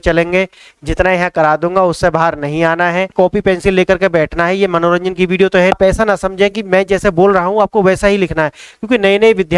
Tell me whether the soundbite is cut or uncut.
cut